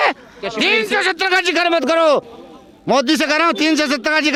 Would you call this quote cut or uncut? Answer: uncut